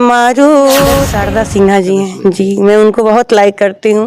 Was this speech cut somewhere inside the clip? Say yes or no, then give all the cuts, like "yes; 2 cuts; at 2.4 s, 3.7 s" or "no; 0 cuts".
yes; 1 cut; at 1.1 s